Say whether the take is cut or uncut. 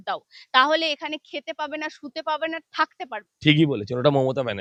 uncut